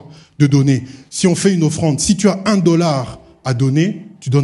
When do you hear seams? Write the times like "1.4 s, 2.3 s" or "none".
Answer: none